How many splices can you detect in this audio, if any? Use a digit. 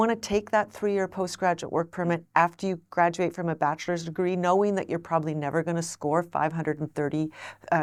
0